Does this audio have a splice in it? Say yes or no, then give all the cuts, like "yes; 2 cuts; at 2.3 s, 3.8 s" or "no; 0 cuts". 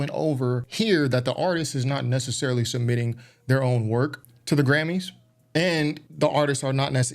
yes; 2 cuts; at 4.3 s, 6.1 s